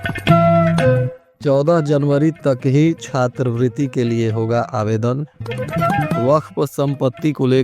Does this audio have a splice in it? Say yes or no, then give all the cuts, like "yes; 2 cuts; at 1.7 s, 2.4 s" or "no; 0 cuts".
yes; 1 cut; at 1.2 s